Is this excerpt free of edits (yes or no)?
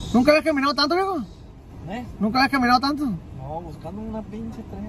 yes